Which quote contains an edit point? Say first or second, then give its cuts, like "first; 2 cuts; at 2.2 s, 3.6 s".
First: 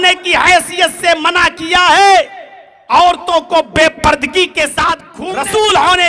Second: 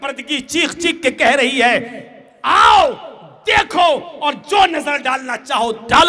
first; 1 cut; at 5.1 s